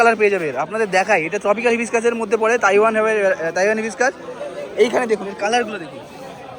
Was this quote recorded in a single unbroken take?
yes; 0 cuts

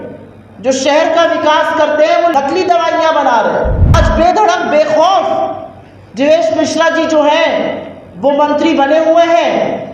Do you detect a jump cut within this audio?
yes; 2 cuts; at 2.3 s, 3.9 s

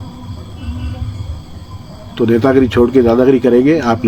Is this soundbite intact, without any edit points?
yes; 0 cuts

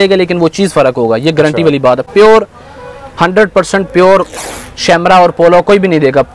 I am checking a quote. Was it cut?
no; 0 cuts

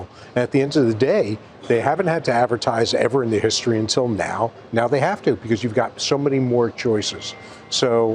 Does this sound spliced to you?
no; 0 cuts

